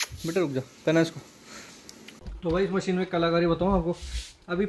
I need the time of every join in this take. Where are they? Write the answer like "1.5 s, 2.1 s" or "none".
2.2 s